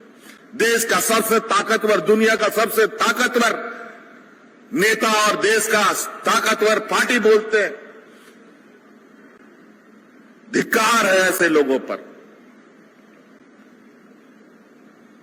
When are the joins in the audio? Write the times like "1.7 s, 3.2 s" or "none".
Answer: none